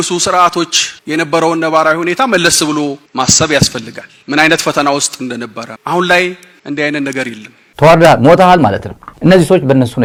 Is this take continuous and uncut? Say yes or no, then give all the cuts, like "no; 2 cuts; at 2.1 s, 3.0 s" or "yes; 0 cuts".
yes; 0 cuts